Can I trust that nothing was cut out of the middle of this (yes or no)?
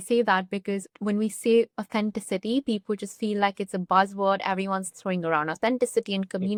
yes